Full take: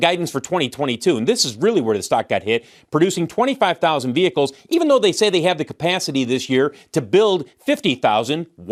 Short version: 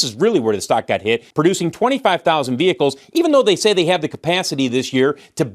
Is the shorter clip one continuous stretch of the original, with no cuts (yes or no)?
no